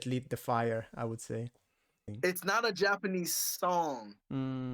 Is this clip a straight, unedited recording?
no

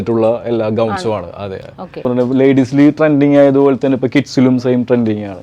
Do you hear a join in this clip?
yes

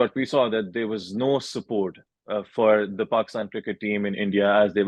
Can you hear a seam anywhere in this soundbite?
no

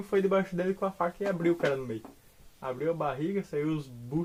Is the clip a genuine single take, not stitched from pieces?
yes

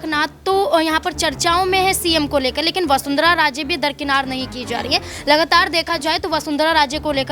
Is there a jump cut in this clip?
no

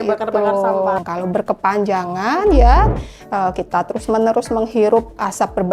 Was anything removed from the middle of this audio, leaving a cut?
yes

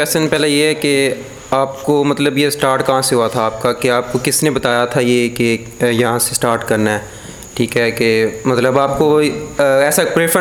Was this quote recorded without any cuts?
yes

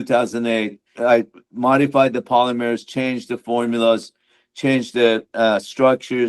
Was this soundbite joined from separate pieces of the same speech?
yes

